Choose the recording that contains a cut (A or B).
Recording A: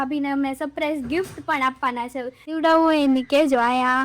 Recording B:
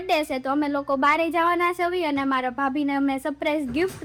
A